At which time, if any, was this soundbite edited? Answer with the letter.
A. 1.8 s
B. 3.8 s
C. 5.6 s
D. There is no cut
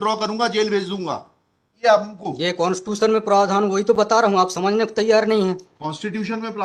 A